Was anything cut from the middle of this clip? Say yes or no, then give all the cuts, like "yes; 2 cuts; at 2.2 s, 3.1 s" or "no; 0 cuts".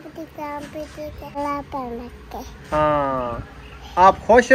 yes; 1 cut; at 1.4 s